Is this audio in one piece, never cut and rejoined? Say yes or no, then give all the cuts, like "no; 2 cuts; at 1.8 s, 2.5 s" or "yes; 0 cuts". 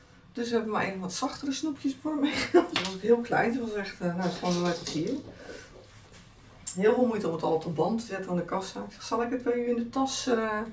no; 1 cut; at 2.8 s